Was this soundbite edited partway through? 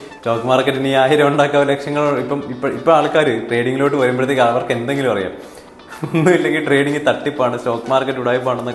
no; 0 cuts

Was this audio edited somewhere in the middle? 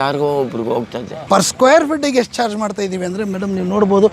yes; 1 cut; at 1.2 s

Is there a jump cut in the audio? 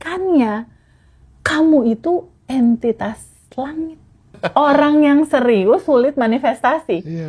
yes; 1 cut; at 4.4 s

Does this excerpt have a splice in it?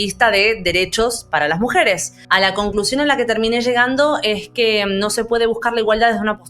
yes; 1 cut; at 2.1 s

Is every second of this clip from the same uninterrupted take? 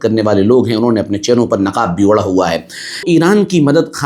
no; 1 cut; at 3.0 s

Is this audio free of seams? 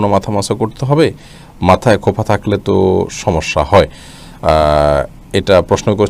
yes; 0 cuts

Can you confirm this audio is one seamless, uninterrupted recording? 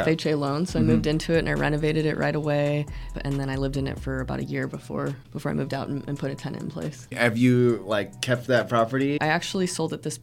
no; 4 cuts; at 3.2 s, 5.2 s, 7.1 s, 9.2 s

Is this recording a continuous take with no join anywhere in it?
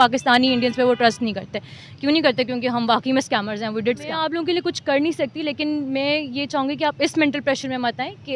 no; 1 cut; at 4.3 s

